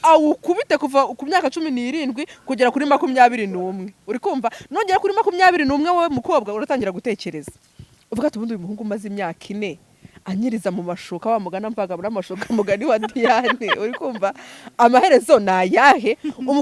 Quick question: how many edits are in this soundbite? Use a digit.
0